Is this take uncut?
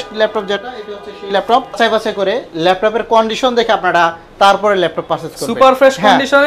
no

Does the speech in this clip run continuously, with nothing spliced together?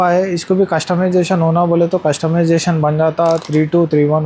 yes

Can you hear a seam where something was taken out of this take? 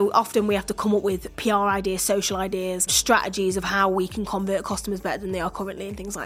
yes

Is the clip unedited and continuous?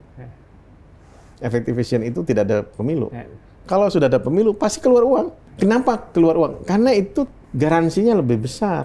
no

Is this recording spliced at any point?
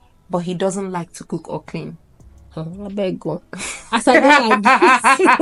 no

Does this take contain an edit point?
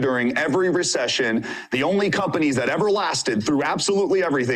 yes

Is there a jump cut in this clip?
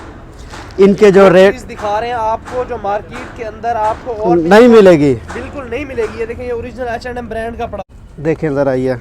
yes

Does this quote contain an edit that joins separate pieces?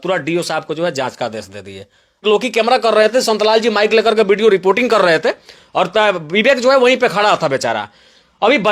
yes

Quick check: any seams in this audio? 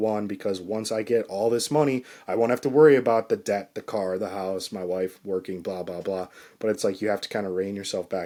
no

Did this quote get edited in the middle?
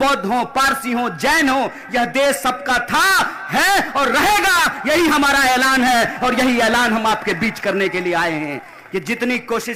no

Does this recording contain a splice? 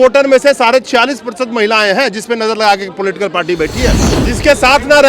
yes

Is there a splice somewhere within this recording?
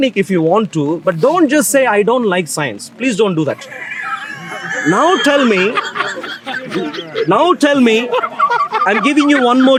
no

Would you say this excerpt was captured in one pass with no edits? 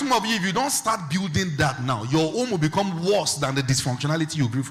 yes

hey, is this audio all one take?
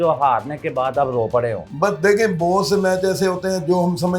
no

